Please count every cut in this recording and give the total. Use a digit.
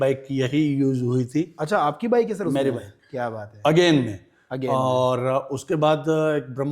0